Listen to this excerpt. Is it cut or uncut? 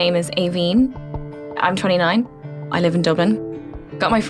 cut